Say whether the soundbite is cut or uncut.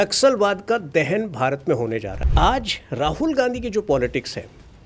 cut